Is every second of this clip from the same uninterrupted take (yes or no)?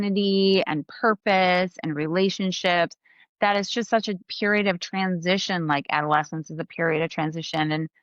no